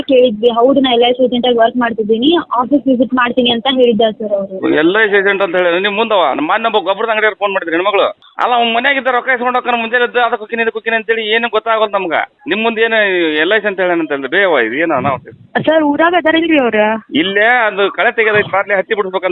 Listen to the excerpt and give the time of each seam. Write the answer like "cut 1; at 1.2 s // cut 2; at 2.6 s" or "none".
cut 1; at 8.2 s // cut 2; at 15.3 s